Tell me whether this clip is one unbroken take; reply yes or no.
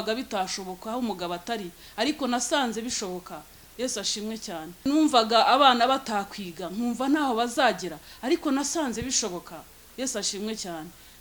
no